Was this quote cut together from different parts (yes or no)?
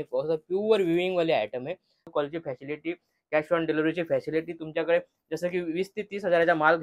yes